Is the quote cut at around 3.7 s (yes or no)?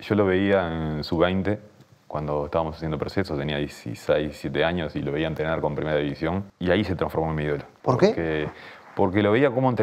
no